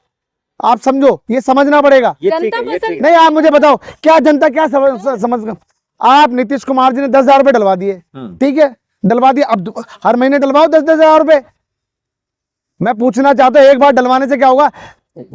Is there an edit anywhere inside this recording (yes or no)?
no